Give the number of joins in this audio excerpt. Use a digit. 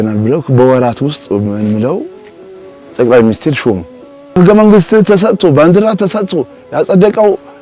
1